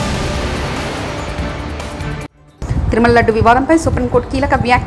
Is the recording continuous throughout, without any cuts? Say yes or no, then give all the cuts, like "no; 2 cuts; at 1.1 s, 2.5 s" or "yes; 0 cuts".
no; 1 cut; at 2.4 s